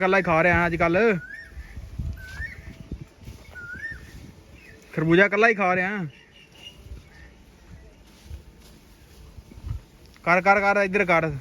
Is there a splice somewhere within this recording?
no; 0 cuts

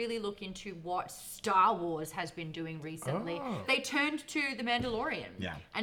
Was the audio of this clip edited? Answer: yes; 1 cut; at 3.6 s

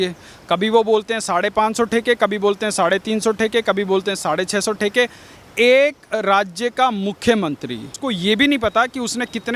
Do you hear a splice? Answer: yes; 1 cut; at 8.0 s

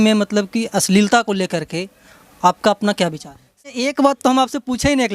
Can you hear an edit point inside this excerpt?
yes; 1 cut; at 3.7 s

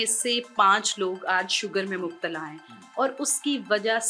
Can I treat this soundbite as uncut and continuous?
yes; 0 cuts

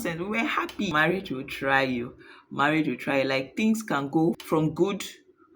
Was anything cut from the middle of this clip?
yes; 2 cuts; at 0.9 s, 4.4 s

